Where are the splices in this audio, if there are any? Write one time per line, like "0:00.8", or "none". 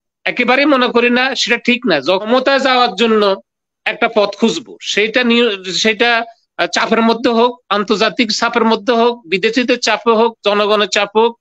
0:02.2